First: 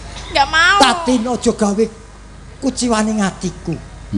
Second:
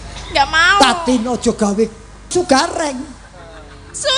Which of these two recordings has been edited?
second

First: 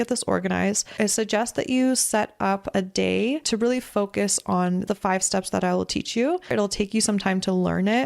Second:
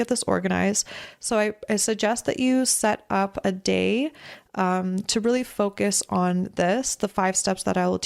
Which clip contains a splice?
first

